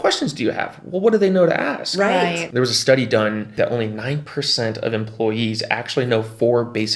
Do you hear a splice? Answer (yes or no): yes